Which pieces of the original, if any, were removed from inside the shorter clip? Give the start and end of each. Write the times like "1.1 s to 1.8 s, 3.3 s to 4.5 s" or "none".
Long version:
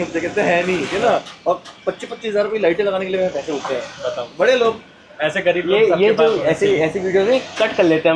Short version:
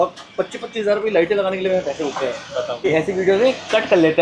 4.3 s to 6.7 s